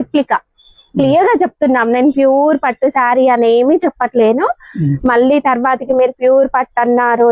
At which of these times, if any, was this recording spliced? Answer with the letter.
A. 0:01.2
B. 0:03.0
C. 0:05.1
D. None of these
D